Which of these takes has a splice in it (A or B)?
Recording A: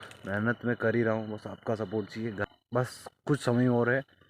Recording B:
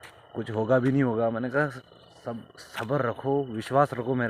A